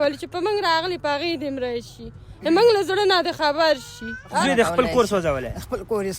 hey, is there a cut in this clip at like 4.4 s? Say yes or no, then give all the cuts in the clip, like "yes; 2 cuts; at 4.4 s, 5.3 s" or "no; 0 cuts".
yes; 1 cut; at 4.4 s